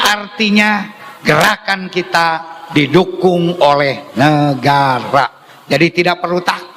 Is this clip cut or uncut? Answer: uncut